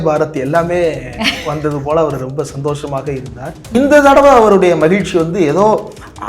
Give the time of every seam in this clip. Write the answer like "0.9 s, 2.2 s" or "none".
3.7 s